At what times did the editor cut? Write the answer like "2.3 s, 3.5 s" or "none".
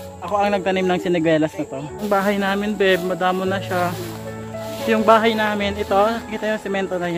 2.0 s